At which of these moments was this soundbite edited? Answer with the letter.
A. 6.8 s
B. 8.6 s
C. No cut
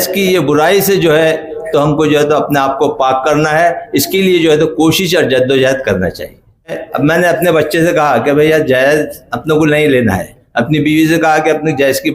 A